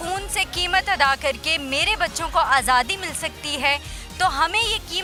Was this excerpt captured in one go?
yes; 0 cuts

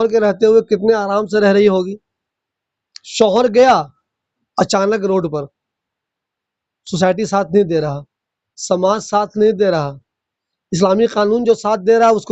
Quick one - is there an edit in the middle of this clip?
no; 0 cuts

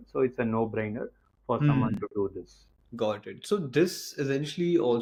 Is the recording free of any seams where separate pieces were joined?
yes; 0 cuts

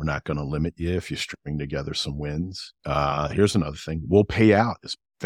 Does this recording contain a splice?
no; 0 cuts

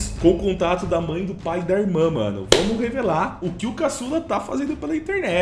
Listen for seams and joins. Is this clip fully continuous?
yes; 0 cuts

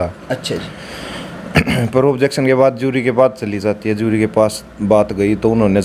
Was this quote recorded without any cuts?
yes; 0 cuts

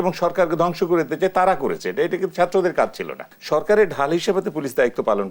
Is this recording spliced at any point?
yes; 1 cut; at 3.3 s

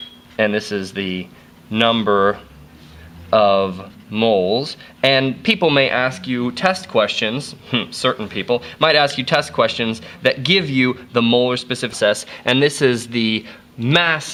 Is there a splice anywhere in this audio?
no; 0 cuts

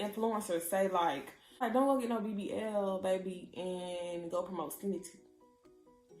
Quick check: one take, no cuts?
no; 1 cut; at 1.6 s

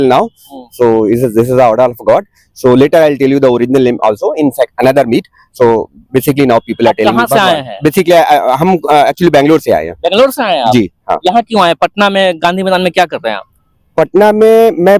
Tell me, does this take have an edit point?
no; 0 cuts

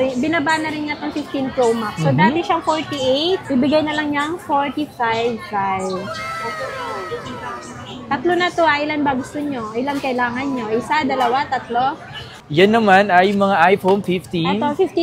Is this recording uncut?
yes; 0 cuts

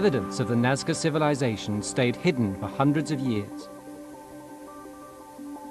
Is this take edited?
no; 0 cuts

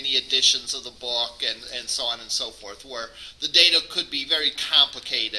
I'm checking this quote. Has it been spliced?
yes; 1 cut; at 2.6 s

